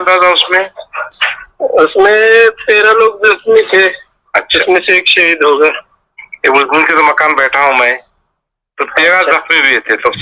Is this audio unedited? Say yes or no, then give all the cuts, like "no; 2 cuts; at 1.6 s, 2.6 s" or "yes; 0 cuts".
yes; 0 cuts